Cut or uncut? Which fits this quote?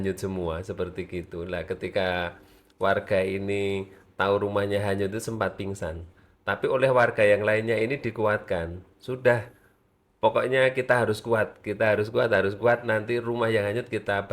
uncut